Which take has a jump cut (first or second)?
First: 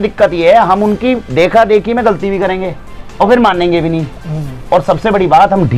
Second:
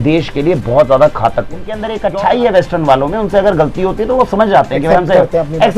second